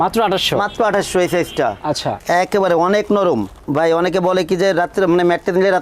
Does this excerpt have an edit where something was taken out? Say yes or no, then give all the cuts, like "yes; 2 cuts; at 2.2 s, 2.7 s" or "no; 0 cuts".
yes; 1 cut; at 2.2 s